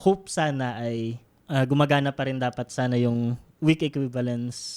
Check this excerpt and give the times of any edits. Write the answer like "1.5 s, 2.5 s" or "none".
1.3 s, 3.4 s